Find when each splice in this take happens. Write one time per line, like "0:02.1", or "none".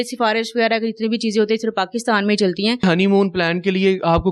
0:02.8